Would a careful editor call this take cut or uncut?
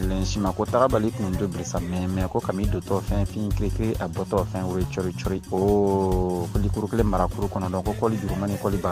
uncut